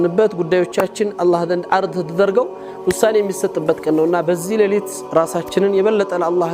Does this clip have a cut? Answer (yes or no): no